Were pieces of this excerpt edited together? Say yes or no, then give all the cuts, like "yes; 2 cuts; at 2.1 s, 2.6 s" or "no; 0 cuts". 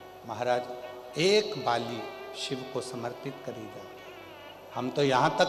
no; 0 cuts